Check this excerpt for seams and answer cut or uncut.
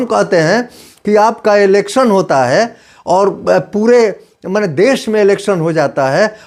uncut